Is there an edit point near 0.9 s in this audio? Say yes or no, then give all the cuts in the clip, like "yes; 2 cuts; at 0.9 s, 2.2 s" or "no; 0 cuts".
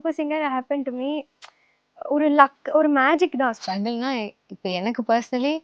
no; 1 cut; at 3.6 s